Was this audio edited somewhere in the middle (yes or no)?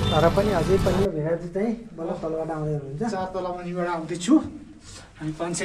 yes